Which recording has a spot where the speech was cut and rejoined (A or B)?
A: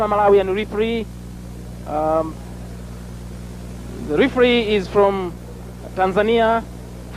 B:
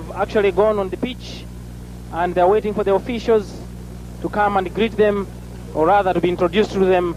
A